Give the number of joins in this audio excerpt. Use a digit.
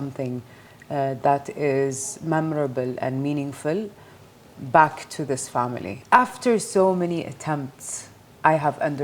1